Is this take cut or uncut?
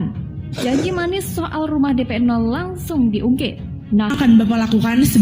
cut